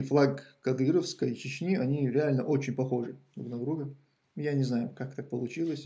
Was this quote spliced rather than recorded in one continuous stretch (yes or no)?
no